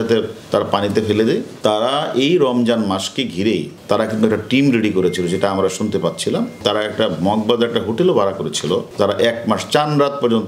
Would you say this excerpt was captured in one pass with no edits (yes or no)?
no